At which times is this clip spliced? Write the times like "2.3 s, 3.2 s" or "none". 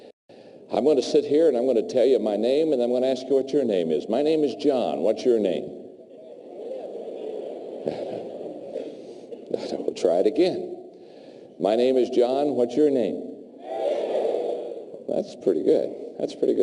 1.3 s